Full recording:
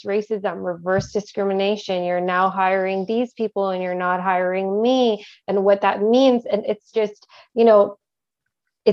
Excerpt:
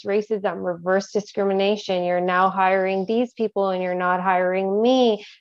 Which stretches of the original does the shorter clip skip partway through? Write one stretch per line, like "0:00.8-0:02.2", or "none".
none